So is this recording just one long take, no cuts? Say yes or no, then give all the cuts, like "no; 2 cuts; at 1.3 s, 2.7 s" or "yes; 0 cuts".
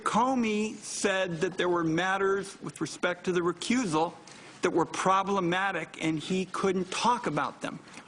yes; 0 cuts